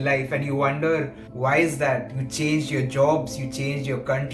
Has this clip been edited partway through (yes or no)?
yes